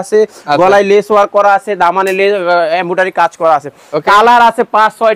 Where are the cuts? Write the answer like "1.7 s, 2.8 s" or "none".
none